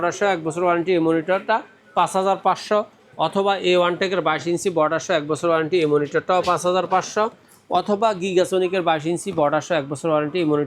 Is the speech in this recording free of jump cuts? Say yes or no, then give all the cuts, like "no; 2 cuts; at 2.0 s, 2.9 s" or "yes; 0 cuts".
yes; 0 cuts